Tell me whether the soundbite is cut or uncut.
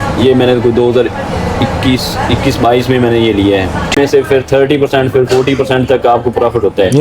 cut